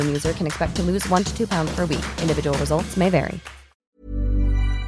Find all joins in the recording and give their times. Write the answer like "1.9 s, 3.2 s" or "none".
4.0 s